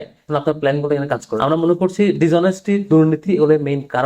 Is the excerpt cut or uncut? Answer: cut